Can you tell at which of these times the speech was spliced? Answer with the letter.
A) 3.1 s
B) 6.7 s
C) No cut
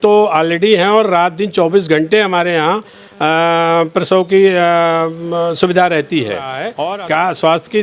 B